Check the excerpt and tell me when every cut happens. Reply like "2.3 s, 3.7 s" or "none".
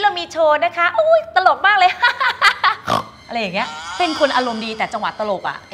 3.8 s